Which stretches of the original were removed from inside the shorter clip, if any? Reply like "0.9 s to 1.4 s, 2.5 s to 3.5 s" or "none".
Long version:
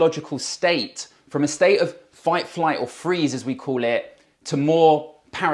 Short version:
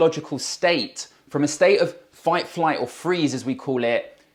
none